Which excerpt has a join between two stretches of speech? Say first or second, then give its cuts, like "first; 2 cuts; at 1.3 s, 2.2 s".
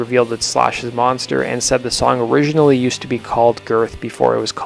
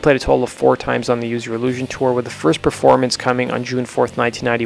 second; 1 cut; at 2.1 s